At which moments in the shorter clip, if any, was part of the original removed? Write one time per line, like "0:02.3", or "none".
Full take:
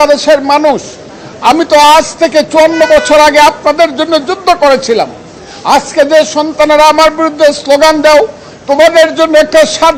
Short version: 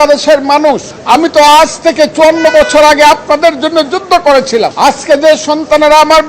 0:00.9
0:04.7